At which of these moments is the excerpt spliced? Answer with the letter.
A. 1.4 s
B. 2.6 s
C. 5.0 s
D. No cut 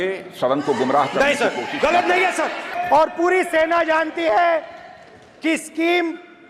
B